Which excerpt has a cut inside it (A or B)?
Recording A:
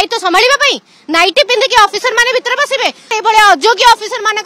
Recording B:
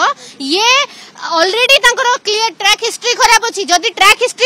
A